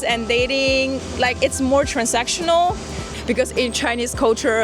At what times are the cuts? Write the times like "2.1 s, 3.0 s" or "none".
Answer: 3.2 s